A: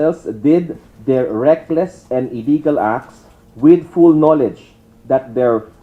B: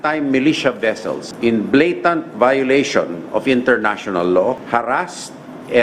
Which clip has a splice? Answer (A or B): B